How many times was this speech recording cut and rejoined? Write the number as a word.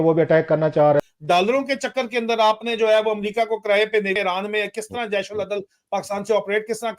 two